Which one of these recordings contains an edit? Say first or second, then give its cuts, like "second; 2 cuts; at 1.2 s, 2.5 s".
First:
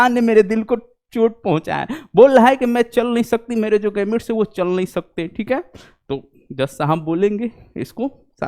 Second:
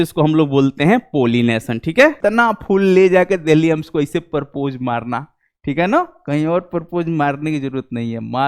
second; 1 cut; at 2.2 s